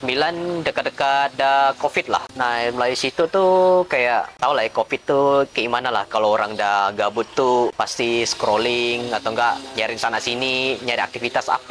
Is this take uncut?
no; 3 cuts; at 2.3 s, 4.3 s, 7.7 s

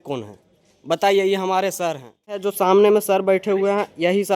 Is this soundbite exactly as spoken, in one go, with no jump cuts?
no; 1 cut; at 2.5 s

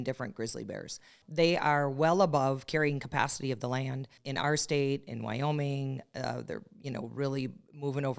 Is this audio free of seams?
no; 2 cuts; at 1.1 s, 4.2 s

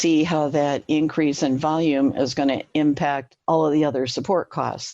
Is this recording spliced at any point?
no; 0 cuts

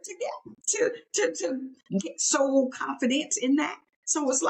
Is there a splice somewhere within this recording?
no; 0 cuts

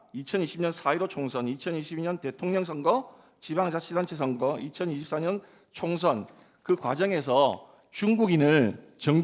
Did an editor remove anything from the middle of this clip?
no; 0 cuts

